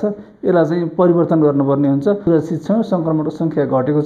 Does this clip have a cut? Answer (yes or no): yes